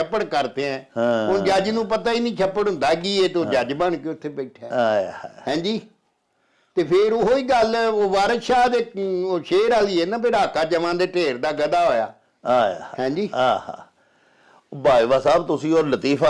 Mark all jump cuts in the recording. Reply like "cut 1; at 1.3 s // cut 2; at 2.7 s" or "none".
none